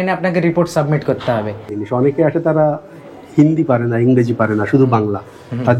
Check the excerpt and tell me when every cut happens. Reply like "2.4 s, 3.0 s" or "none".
1.7 s